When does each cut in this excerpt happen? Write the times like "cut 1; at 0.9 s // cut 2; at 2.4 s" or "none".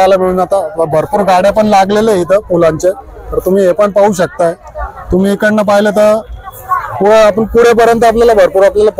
none